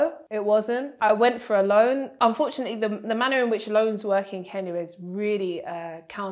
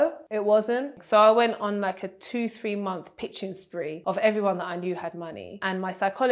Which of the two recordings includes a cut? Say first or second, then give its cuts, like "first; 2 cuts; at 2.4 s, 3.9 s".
second; 2 cuts; at 0.9 s, 4.0 s